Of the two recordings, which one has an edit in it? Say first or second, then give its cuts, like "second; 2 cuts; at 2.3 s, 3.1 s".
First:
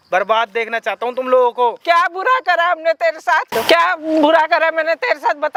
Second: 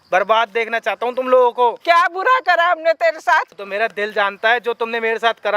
second; 1 cut; at 3.5 s